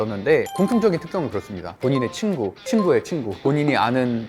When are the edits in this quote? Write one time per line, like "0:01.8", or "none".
0:01.6